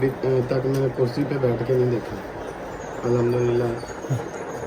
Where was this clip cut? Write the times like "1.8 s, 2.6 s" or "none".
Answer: none